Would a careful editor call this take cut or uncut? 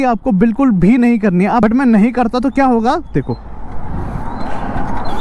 cut